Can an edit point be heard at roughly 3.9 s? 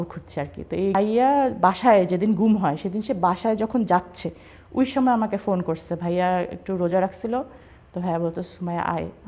no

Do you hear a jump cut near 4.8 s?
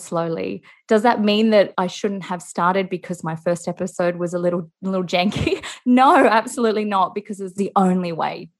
no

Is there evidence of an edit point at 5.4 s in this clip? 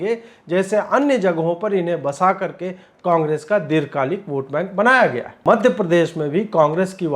yes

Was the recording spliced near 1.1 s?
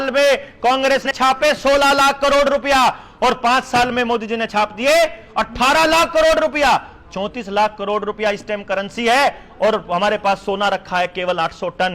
yes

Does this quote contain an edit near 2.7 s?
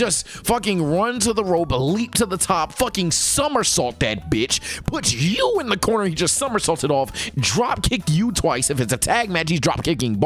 no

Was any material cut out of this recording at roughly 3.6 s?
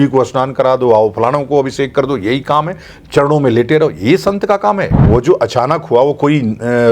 no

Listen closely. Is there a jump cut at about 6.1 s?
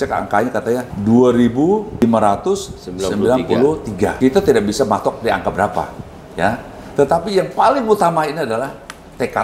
no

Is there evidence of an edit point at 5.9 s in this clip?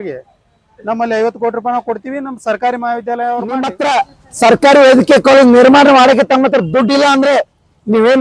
no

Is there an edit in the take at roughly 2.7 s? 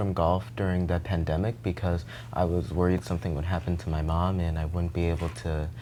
no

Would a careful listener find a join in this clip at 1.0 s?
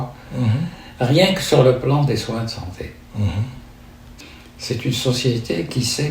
no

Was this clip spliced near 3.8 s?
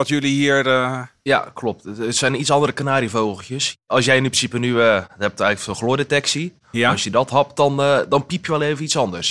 yes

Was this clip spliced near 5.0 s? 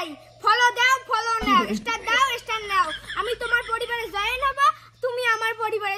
no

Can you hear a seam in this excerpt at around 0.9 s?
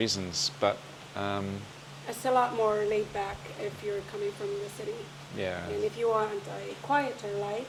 no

